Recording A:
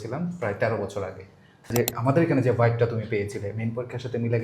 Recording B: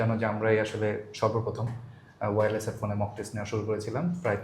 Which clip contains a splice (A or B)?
A